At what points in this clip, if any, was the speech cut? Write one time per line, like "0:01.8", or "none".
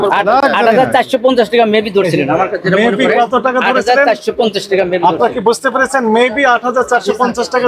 none